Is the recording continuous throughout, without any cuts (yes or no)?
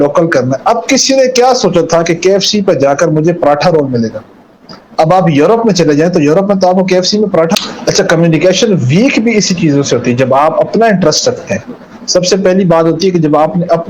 no